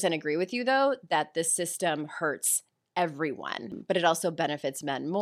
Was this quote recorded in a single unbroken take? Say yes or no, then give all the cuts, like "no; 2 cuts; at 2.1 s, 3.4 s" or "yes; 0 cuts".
no; 1 cut; at 3.8 s